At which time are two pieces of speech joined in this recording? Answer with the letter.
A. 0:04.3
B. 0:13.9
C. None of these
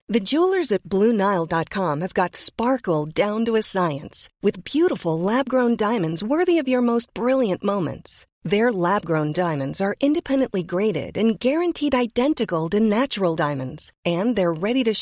C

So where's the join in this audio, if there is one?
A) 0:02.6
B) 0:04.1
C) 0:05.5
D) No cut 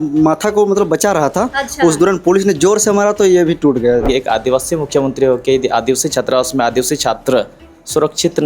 B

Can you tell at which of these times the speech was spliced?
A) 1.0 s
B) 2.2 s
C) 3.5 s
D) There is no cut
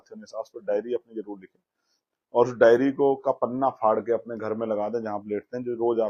D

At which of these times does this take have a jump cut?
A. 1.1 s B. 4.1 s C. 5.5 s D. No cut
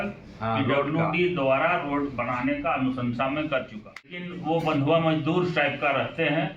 B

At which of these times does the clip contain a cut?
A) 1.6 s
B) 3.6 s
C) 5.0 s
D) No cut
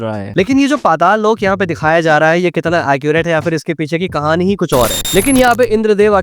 C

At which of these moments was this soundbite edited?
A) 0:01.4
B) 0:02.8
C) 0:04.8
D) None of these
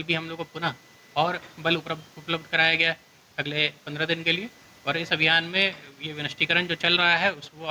D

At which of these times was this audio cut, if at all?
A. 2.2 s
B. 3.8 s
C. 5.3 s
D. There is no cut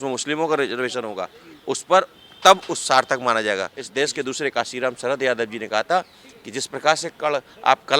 B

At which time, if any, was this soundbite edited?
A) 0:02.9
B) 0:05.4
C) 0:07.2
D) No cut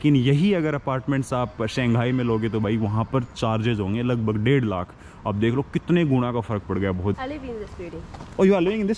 C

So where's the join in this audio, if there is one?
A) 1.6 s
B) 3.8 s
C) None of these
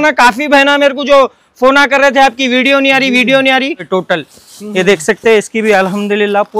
B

